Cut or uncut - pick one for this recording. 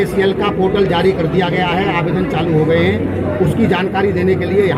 uncut